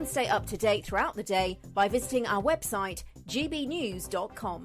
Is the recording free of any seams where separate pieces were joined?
yes; 0 cuts

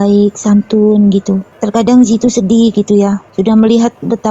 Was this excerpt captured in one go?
no; 2 cuts; at 1.5 s, 3.2 s

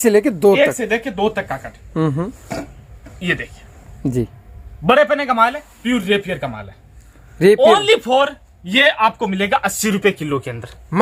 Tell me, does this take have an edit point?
no; 0 cuts

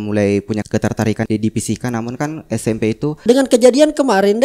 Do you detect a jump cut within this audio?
yes; 2 cuts; at 1.1 s, 3.2 s

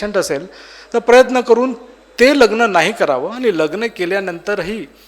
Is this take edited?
no; 0 cuts

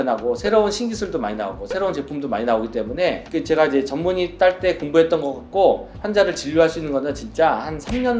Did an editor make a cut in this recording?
no; 0 cuts

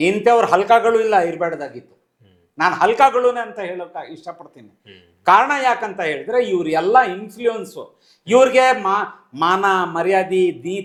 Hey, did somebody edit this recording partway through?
no; 0 cuts

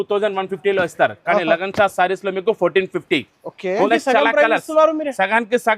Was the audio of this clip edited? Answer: yes; 1 cut; at 3.9 s

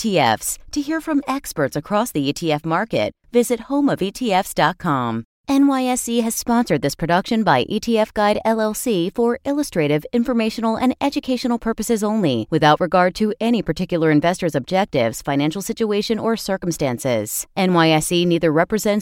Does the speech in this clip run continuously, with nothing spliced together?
no; 1 cut; at 5.3 s

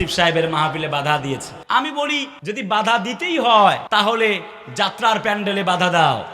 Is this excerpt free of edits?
no; 3 cuts; at 1.5 s, 2.3 s, 3.8 s

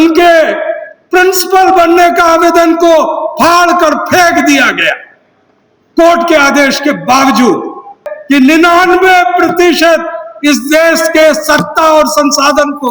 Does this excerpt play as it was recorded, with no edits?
no; 1 cut; at 8.1 s

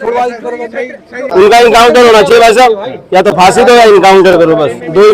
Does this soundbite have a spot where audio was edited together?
yes; 1 cut; at 1.3 s

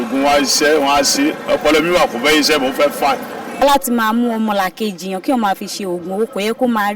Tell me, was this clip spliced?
yes; 1 cut; at 3.6 s

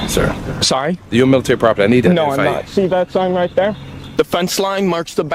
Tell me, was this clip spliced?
no; 0 cuts

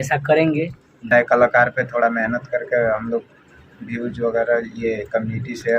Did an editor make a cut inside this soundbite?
yes; 1 cut; at 1.1 s

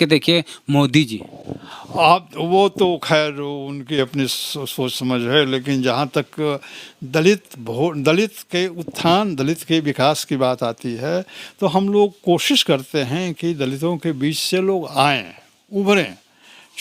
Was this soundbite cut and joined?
no; 0 cuts

